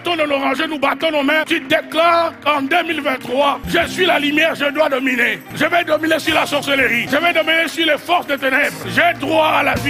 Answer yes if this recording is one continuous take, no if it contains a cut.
no